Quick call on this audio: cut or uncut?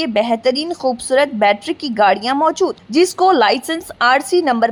uncut